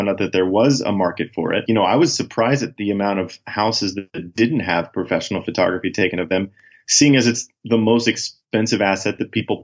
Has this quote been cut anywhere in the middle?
yes; 1 cut; at 1.6 s

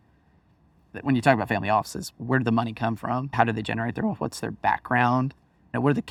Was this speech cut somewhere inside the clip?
no; 0 cuts

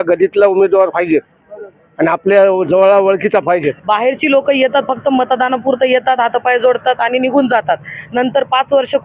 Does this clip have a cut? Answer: yes; 1 cut; at 3.7 s

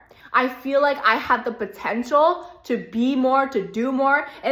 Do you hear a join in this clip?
no; 0 cuts

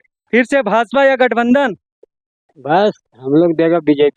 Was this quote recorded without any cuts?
yes; 0 cuts

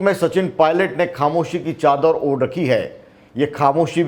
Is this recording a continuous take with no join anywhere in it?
yes; 0 cuts

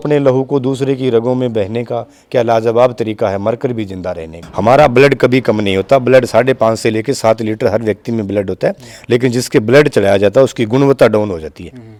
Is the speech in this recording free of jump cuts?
yes; 0 cuts

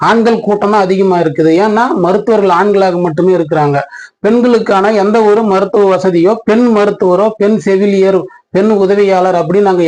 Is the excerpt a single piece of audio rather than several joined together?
yes; 0 cuts

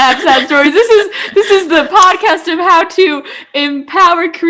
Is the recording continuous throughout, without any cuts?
yes; 0 cuts

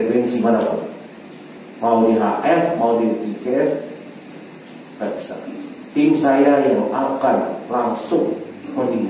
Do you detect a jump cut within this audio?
no; 0 cuts

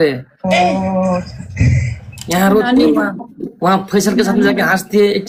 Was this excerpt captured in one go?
yes; 0 cuts

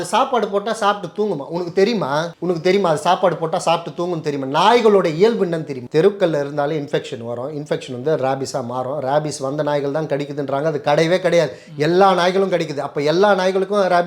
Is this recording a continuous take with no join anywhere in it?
no; 2 cuts; at 2.3 s, 5.8 s

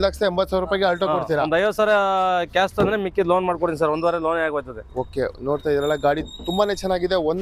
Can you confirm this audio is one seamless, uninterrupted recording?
yes; 0 cuts

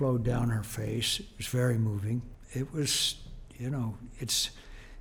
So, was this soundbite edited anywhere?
yes; 1 cut; at 2.4 s

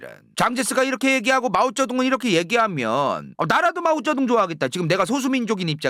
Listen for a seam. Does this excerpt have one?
no; 0 cuts

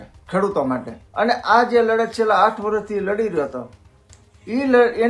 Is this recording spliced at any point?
yes; 1 cut; at 1.0 s

